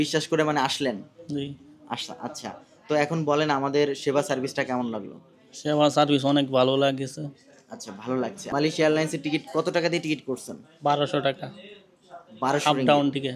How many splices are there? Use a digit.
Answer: 1